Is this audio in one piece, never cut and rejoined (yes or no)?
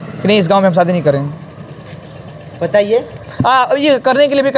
yes